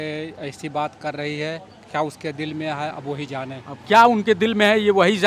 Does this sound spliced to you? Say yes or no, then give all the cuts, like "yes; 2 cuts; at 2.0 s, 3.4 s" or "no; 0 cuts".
no; 0 cuts